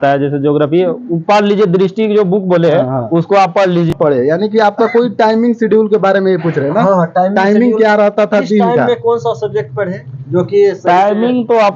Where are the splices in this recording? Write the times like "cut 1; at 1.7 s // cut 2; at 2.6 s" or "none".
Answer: cut 1; at 3.9 s